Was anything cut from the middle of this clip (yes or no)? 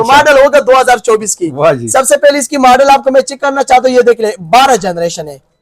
no